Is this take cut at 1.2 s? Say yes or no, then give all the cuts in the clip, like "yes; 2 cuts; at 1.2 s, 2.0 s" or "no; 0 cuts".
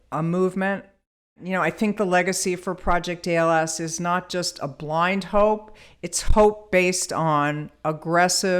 yes; 1 cut; at 1.2 s